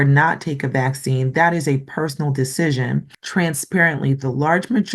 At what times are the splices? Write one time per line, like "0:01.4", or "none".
0:03.2